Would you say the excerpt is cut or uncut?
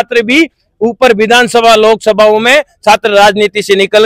uncut